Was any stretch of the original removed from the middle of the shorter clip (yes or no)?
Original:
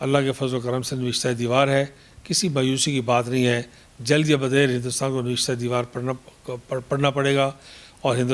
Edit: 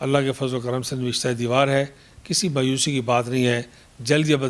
no